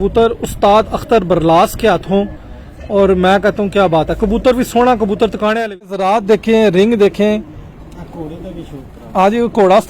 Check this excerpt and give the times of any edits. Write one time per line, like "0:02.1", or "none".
0:06.0